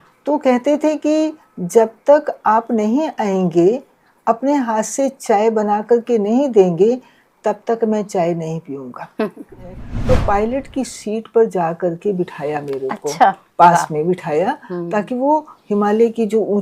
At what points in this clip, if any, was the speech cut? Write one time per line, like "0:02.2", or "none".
0:09.9

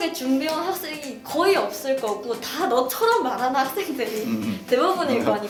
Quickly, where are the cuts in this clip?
none

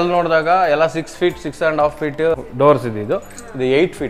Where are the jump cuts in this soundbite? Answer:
0:02.3

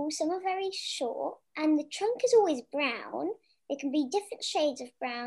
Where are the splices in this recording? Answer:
0:01.4

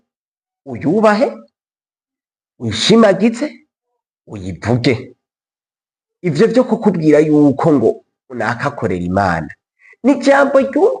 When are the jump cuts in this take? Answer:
none

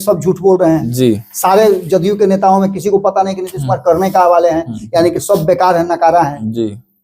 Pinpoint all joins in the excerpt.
none

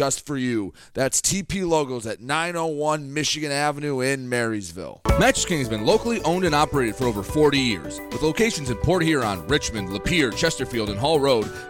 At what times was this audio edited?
0:05.0

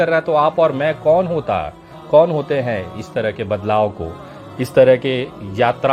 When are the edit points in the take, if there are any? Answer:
none

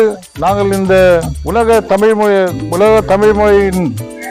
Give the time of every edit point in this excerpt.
none

